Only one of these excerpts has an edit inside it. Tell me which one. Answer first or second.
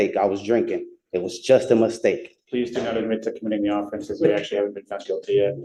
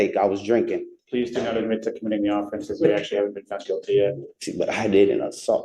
second